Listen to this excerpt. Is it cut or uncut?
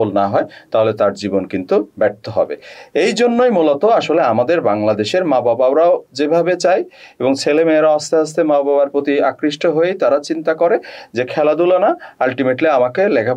uncut